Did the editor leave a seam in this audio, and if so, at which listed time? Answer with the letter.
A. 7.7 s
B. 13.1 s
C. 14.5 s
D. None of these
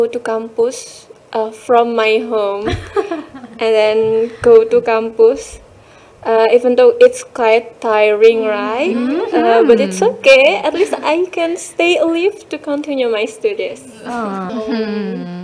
C